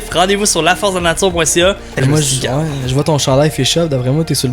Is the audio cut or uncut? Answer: cut